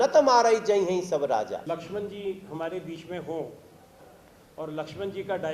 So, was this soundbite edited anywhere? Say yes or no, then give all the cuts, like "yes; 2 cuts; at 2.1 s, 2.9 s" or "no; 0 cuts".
yes; 1 cut; at 1.6 s